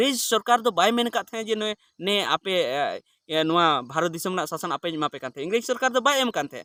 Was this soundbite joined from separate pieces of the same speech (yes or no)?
no